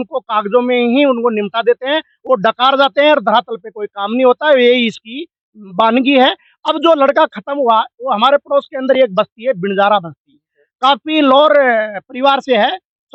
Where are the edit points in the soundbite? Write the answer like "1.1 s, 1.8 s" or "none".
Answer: none

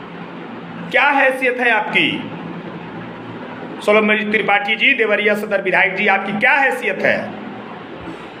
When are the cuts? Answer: none

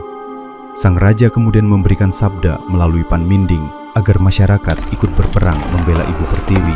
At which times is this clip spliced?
none

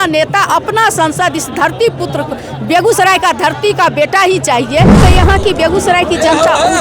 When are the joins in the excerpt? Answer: 5.0 s

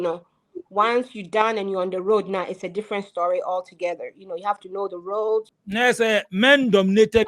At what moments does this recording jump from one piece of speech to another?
5.5 s

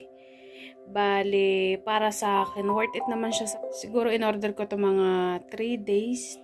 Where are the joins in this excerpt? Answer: 3.5 s

